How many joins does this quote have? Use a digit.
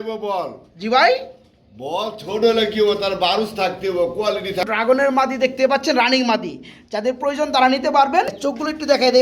2